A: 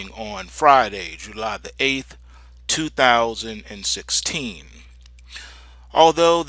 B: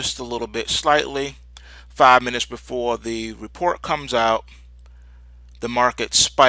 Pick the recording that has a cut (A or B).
B